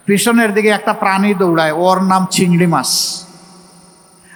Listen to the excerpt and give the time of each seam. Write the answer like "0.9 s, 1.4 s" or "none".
none